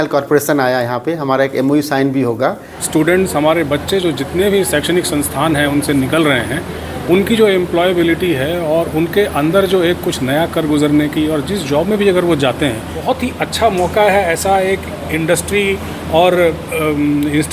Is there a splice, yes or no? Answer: yes